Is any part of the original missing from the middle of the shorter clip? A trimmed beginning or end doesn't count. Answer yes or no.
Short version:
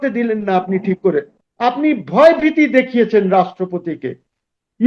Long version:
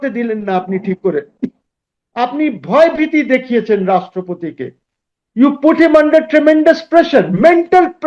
yes